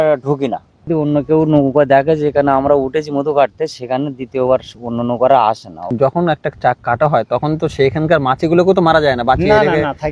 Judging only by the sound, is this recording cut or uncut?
cut